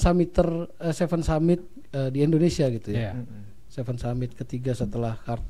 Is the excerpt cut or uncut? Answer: uncut